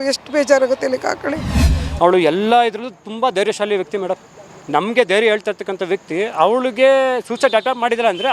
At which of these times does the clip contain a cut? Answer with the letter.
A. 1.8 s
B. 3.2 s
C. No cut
A